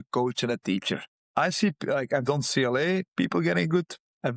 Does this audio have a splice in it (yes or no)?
yes